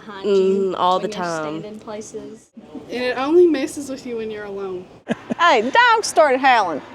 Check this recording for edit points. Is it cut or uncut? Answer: cut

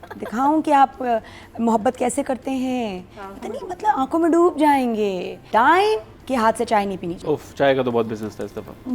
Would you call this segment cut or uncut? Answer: cut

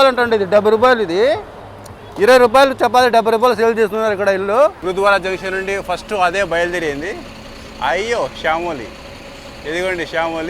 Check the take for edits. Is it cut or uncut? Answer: cut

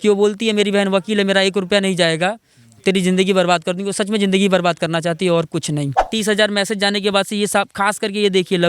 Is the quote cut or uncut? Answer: cut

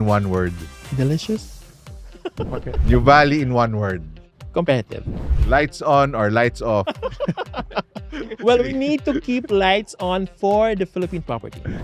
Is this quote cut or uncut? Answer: cut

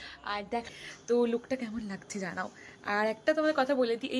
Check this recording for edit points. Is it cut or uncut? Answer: cut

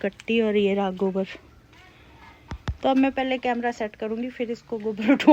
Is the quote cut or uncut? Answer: uncut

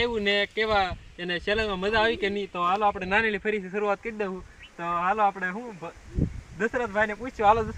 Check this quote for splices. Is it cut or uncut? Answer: uncut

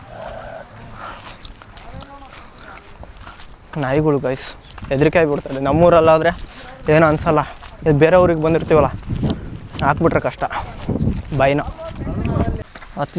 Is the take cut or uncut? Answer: uncut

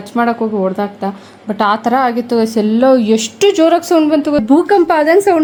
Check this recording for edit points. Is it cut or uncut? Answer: uncut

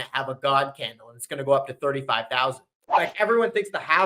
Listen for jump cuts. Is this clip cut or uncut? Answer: cut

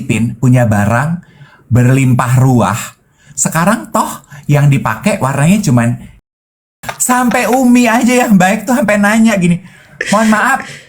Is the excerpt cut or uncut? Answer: cut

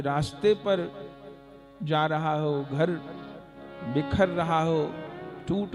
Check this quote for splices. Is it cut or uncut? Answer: uncut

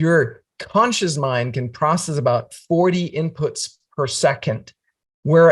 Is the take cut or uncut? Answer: uncut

